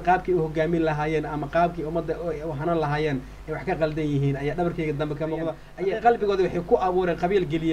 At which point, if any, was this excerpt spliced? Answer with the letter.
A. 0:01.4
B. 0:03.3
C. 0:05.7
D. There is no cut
C